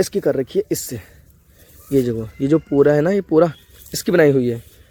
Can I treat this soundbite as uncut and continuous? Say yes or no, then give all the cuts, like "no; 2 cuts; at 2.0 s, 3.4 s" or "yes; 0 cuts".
yes; 0 cuts